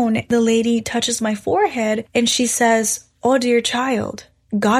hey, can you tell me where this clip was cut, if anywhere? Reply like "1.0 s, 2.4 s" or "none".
none